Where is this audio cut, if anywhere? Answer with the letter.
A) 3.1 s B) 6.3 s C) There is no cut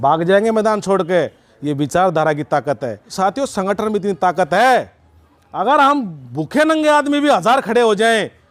A